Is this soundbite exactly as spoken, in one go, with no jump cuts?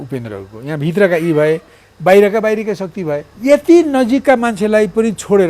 no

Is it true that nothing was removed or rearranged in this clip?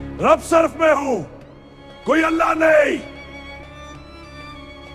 no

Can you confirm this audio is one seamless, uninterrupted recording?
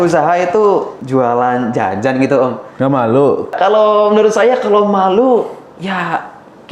no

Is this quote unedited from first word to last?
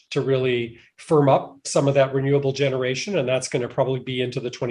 yes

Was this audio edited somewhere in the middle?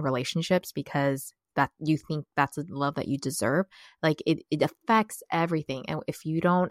no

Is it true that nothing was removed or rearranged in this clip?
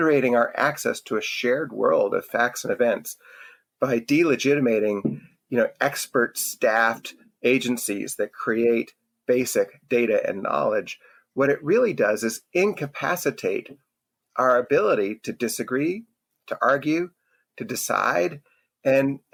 yes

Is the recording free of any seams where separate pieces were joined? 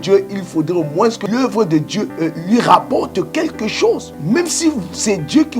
no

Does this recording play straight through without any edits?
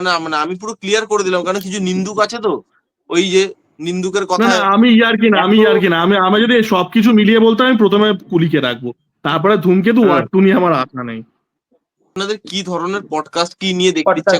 no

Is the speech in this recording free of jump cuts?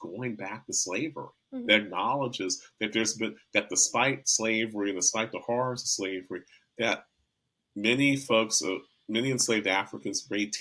yes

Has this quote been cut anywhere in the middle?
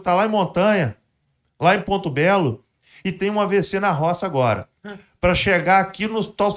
no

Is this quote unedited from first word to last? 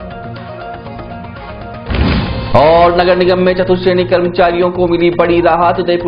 yes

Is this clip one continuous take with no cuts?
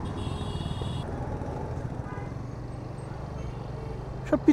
no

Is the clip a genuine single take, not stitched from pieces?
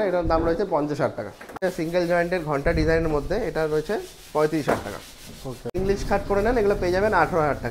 no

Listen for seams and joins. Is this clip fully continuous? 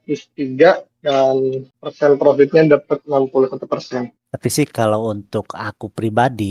no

